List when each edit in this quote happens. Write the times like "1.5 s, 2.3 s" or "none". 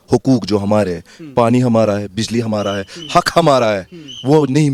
none